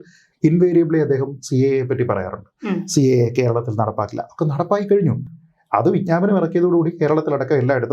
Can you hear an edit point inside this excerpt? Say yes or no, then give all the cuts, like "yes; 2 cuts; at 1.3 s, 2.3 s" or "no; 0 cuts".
no; 0 cuts